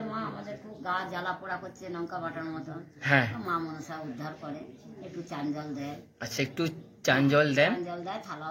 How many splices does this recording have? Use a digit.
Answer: 0